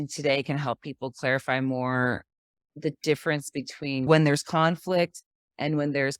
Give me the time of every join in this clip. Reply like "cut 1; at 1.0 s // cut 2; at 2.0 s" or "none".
cut 1; at 4.1 s

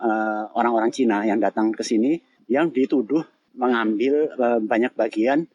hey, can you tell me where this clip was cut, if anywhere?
cut 1; at 2.3 s // cut 2; at 3.4 s

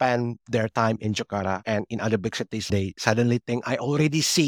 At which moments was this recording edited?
cut 1; at 2.7 s

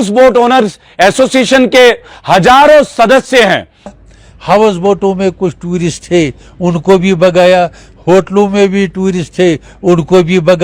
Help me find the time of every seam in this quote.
cut 1; at 3.9 s

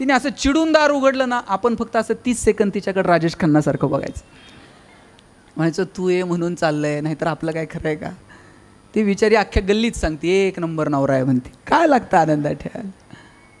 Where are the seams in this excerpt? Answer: none

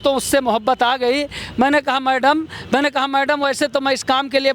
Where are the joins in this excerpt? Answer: none

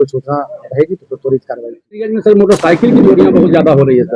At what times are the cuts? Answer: cut 1; at 2.0 s

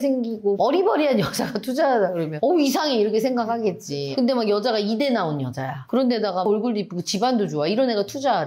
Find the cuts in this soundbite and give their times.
none

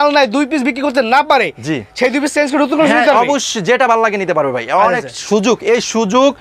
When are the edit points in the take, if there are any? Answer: none

